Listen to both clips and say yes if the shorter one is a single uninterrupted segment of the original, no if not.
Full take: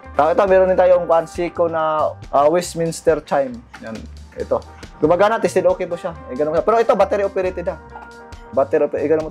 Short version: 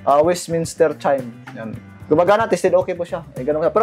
no